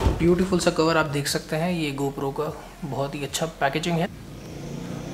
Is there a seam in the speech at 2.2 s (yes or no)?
no